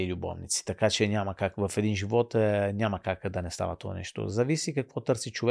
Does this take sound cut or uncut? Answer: uncut